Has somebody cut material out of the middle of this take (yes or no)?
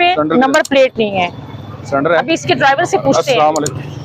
no